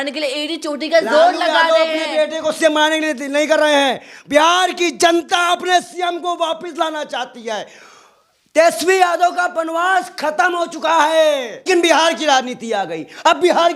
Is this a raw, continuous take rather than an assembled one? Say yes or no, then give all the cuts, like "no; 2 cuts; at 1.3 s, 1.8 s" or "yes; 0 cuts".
no; 1 cut; at 11.7 s